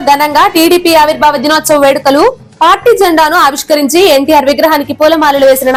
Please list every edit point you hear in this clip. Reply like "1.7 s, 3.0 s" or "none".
none